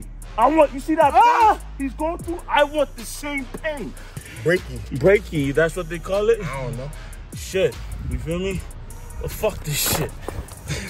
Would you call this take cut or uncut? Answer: cut